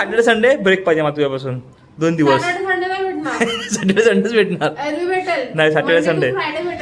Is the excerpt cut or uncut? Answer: uncut